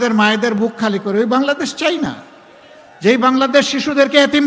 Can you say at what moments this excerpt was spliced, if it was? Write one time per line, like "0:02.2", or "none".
none